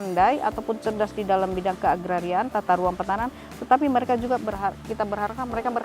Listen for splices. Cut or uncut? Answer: uncut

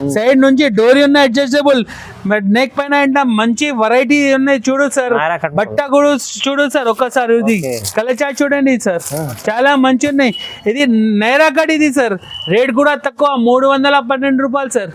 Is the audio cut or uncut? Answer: uncut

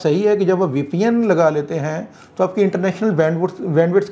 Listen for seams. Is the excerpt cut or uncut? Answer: uncut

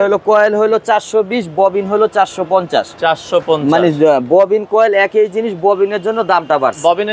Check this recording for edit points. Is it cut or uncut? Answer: uncut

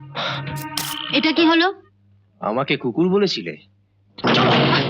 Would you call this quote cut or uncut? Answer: cut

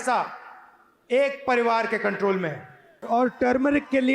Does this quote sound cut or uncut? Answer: cut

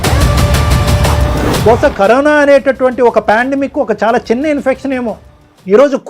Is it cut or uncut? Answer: cut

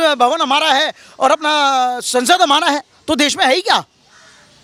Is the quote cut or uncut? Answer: uncut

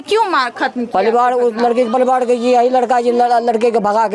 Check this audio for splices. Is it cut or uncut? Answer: uncut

